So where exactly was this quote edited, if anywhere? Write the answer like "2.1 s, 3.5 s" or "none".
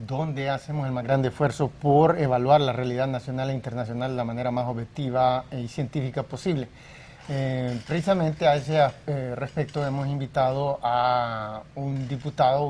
none